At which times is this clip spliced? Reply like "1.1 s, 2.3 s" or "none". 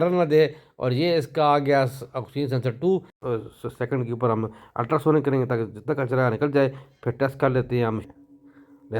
3.2 s, 8.0 s